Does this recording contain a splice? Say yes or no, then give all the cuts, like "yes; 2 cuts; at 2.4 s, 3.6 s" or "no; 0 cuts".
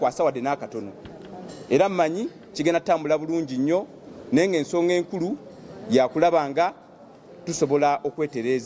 no; 0 cuts